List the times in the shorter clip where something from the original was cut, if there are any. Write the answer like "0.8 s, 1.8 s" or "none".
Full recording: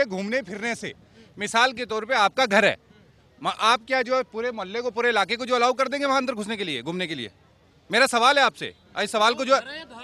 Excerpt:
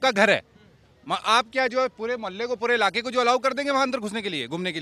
none